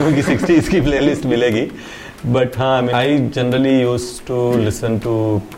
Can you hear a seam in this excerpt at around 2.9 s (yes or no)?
yes